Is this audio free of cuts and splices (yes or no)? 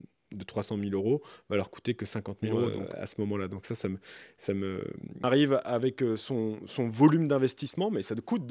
no